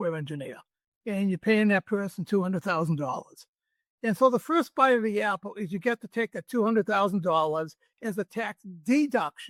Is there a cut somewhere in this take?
no; 0 cuts

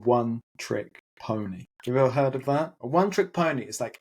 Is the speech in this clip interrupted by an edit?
yes; 2 cuts; at 1.7 s, 2.8 s

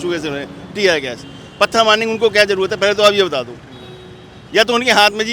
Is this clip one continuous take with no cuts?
yes; 0 cuts

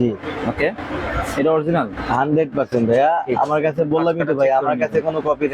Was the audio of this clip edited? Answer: no; 0 cuts

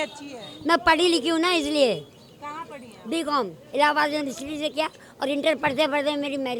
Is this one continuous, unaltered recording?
yes; 0 cuts

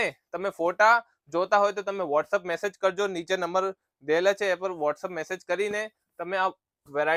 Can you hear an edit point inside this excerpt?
no; 0 cuts

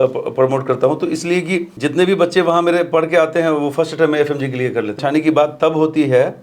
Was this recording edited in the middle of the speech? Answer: yes; 2 cuts; at 1.7 s, 5.0 s

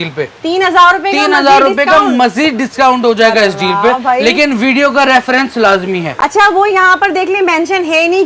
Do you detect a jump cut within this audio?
no; 0 cuts

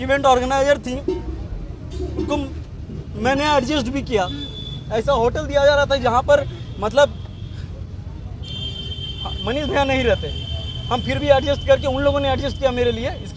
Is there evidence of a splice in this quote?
no; 0 cuts

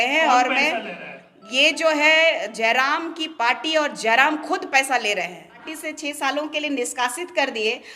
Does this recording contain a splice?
yes; 1 cut; at 5.8 s

